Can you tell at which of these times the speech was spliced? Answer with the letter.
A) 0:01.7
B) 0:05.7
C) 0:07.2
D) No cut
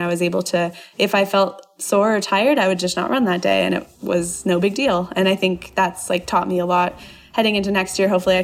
D